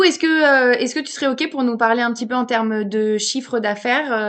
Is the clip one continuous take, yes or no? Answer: yes